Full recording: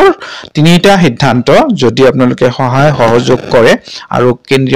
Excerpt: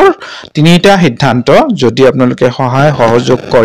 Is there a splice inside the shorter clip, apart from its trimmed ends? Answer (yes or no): no